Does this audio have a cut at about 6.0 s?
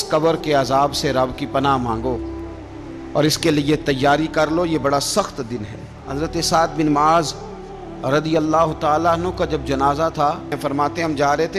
yes; 2 cuts; at 6.0 s, 10.6 s

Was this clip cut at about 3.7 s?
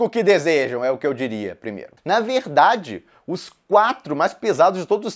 no; 1 cut; at 1.9 s

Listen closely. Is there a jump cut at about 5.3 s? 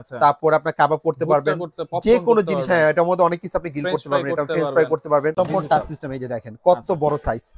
yes; 1 cut; at 5.3 s

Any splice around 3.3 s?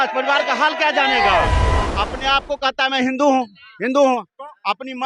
no; 1 cut; at 1.9 s

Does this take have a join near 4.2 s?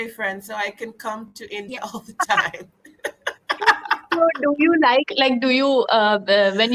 no; 0 cuts

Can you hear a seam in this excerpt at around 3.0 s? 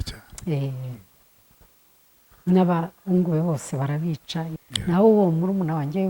no; 1 cut; at 4.5 s

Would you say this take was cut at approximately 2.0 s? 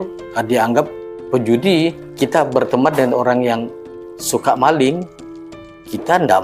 yes; 1 cut; at 2.0 s

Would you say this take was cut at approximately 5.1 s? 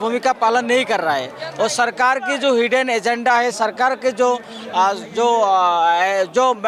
no; 0 cuts

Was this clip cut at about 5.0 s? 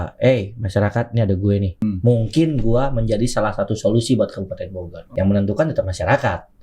yes; 2 cuts; at 1.7 s, 5.0 s

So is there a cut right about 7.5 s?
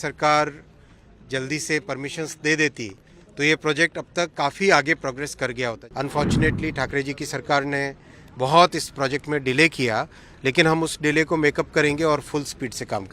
no; 1 cut; at 5.8 s

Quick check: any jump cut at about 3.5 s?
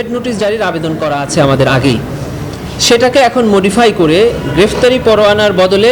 no; 0 cuts

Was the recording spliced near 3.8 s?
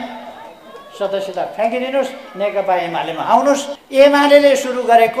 yes; 1 cut; at 3.8 s

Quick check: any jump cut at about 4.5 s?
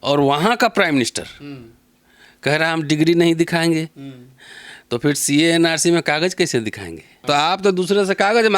no; 1 cut; at 7.2 s

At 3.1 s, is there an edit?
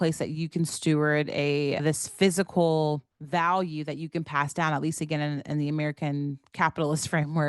yes; 2 cuts; at 1.8 s, 3.1 s

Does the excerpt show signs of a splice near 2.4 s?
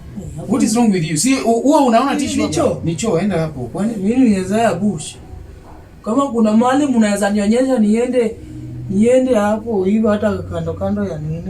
yes; 1 cut; at 2.4 s

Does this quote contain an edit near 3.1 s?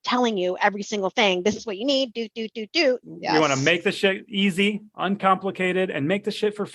yes; 1 cut; at 3.1 s

